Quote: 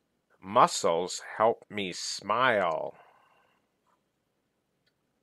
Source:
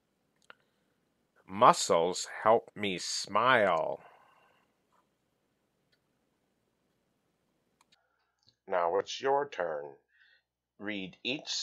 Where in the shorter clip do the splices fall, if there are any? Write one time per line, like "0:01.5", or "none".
none